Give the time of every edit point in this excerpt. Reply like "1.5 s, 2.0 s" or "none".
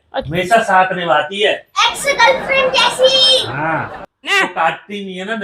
4.3 s